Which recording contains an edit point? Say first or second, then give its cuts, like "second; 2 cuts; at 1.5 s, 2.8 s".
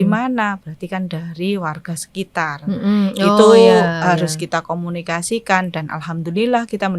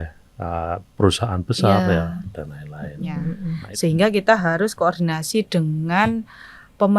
second; 1 cut; at 3.2 s